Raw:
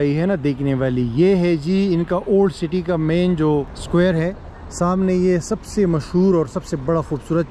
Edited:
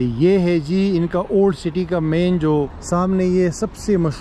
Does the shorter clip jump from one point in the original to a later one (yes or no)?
yes